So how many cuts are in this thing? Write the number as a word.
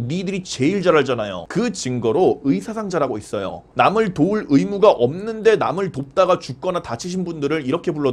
zero